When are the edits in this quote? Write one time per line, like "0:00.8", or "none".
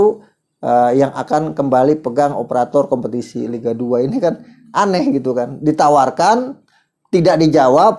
none